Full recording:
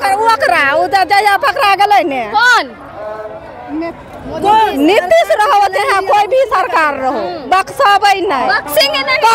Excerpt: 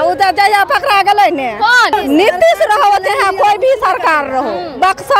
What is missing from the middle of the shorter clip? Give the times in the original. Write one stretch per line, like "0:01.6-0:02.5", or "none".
0:02.7-0:04.6

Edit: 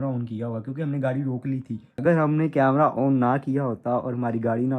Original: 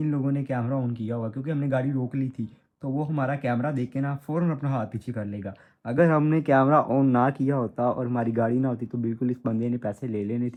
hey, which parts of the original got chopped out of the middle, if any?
0:02.6-0:05.8

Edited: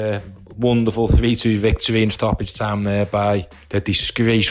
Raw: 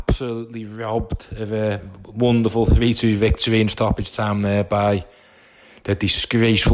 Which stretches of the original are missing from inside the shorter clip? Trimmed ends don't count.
0:05.1-0:05.7

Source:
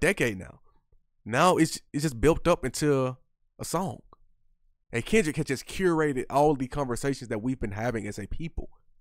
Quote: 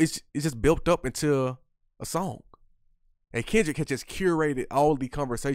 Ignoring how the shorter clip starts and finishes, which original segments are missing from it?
none

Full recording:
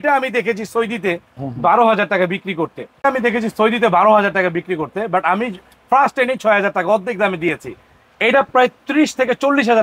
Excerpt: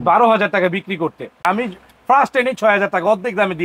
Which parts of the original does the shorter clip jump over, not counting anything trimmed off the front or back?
0:03.0-0:05.2

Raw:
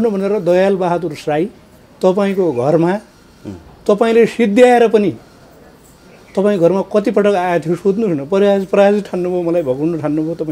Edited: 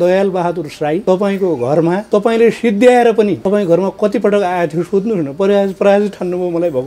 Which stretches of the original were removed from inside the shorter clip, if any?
0:01.5-0:02.0
0:03.0-0:03.8
0:05.1-0:06.3

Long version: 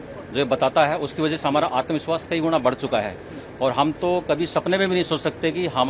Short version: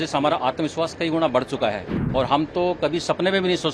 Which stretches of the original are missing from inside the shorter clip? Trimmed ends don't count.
0:03.2-0:03.4

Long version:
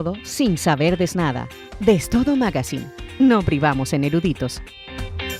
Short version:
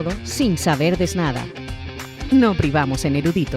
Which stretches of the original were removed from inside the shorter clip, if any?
0:01.7-0:02.6

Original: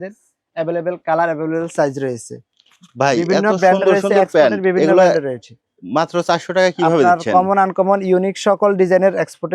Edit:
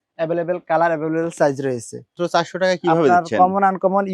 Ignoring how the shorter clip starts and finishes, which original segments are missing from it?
0:02.6-0:06.1

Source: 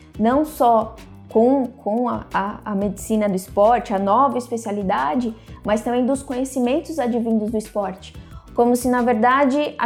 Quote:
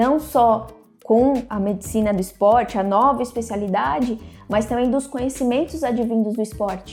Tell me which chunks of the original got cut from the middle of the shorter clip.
0:01.7-0:02.6

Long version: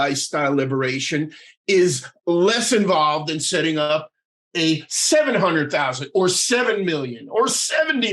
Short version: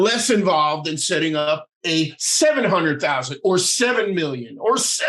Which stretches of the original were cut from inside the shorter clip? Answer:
0:04.2-0:04.4

